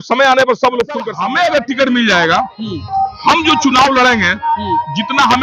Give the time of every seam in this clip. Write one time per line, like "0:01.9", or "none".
0:01.1